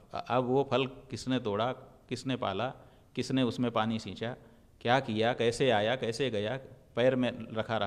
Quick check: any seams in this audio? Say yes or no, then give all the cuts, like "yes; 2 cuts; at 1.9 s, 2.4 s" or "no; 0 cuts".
no; 0 cuts